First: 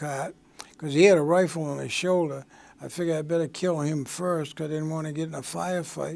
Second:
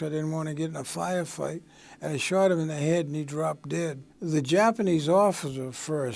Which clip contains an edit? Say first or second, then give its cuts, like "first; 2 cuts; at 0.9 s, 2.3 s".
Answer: second; 1 cut; at 4.1 s